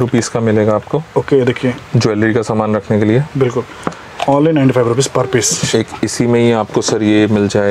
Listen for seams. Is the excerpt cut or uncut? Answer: uncut